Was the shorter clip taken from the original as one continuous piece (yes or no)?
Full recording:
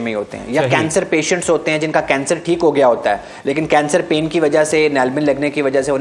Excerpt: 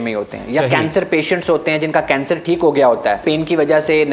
no